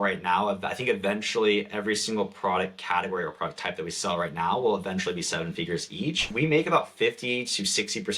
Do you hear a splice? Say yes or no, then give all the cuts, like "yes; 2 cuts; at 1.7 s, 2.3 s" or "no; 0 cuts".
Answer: yes; 1 cut; at 6.3 s